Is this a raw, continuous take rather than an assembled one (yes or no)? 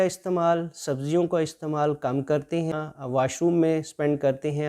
no